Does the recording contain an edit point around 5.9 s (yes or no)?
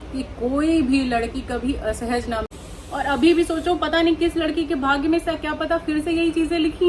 no